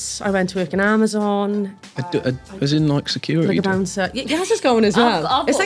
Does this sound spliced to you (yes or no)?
no